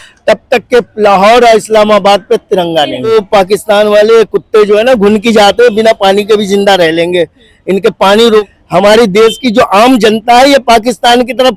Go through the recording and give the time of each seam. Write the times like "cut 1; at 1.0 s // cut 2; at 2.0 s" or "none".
cut 1; at 3.1 s // cut 2; at 8.5 s